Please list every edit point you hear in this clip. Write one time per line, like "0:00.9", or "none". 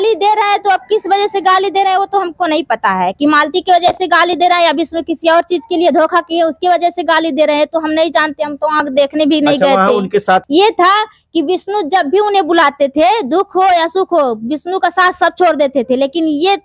0:10.5